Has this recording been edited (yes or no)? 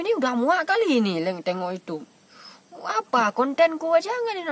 no